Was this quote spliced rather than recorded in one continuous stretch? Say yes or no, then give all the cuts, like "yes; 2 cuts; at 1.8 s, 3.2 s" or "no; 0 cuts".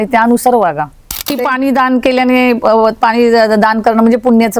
yes; 1 cut; at 1.4 s